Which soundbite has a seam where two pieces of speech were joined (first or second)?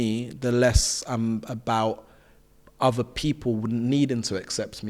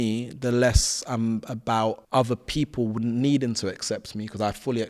second